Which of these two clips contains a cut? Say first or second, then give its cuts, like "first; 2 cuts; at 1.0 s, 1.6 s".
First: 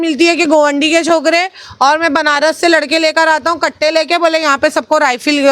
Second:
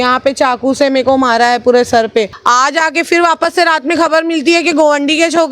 second; 1 cut; at 2.3 s